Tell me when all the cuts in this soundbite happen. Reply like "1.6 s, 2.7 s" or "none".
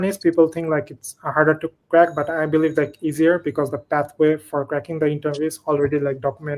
none